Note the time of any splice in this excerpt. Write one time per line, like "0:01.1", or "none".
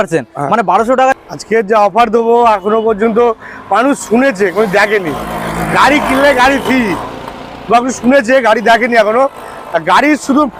0:01.1